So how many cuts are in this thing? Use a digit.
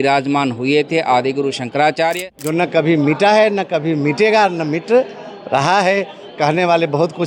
1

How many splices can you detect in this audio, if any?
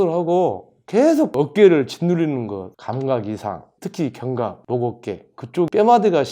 0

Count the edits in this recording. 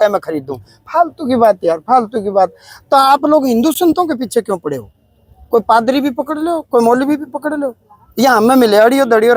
0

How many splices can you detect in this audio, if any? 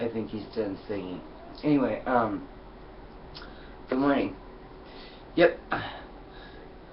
0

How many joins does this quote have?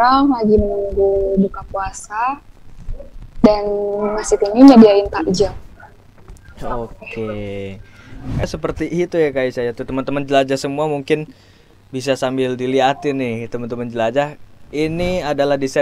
1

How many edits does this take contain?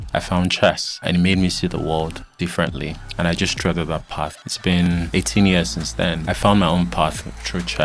4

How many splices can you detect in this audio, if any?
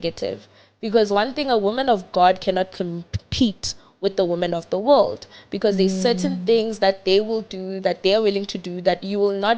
0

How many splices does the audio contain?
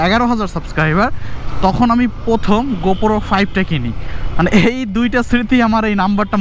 0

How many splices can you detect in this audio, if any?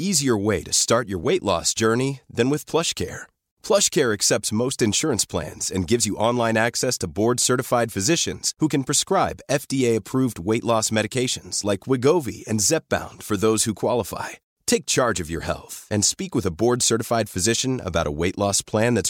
0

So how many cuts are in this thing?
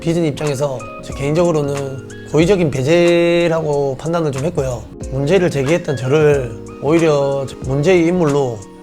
1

